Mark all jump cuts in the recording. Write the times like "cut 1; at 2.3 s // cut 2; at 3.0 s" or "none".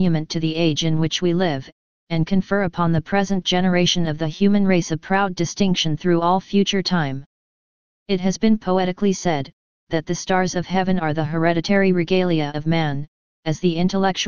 cut 1; at 5.8 s